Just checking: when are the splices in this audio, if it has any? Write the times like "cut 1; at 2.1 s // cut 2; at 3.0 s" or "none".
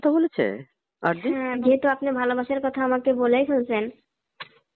cut 1; at 1.6 s